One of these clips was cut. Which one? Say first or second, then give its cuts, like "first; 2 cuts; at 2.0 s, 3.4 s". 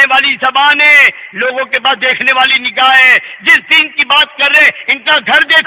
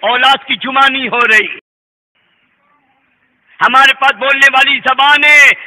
second; 1 cut; at 1.6 s